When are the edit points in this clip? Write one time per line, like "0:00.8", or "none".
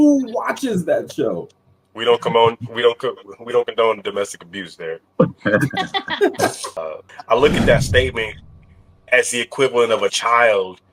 0:06.8

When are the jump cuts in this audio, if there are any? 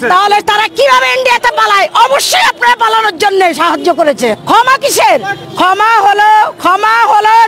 0:04.4

